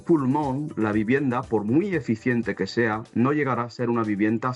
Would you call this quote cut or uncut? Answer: uncut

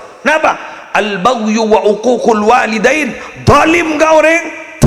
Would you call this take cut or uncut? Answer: uncut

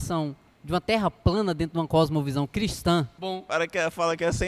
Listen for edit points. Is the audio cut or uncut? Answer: cut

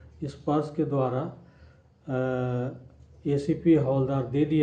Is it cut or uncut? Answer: uncut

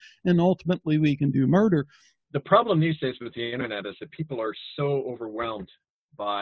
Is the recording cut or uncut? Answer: cut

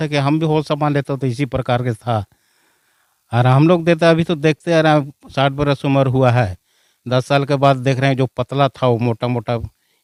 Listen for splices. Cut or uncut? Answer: uncut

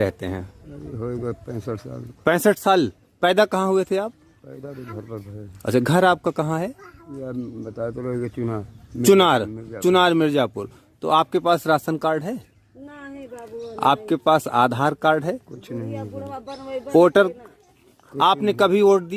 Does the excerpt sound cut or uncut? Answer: uncut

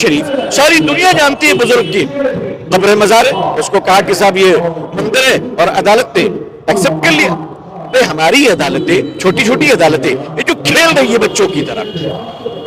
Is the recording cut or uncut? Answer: uncut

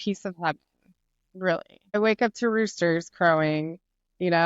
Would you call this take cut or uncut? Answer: cut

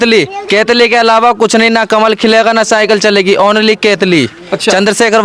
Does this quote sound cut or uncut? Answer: uncut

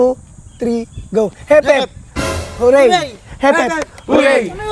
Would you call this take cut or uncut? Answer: uncut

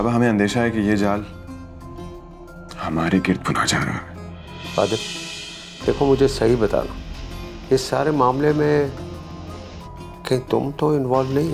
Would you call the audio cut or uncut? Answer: uncut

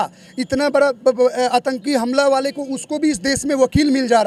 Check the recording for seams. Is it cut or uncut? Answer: uncut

